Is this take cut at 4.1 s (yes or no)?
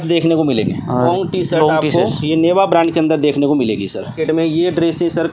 yes